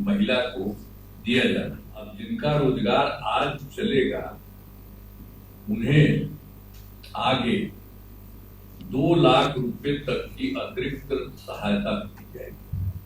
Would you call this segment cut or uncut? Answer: cut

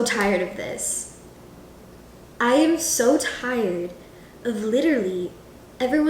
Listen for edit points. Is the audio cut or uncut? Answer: uncut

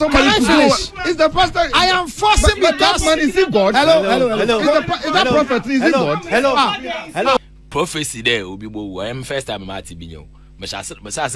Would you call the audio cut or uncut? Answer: cut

